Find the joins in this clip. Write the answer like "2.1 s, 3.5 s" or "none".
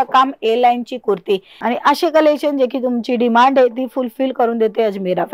1.5 s